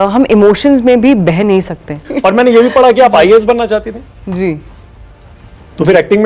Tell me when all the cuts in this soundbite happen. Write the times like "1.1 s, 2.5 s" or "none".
2.1 s